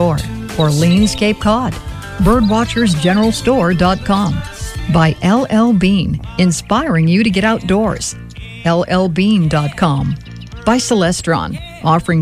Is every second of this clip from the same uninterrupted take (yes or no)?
yes